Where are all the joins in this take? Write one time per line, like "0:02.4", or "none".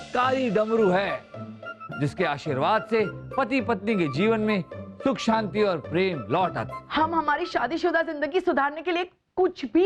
0:06.7